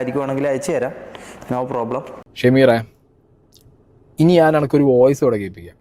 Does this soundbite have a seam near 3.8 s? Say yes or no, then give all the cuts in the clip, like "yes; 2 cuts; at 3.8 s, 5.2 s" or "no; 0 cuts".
no; 1 cut; at 2.3 s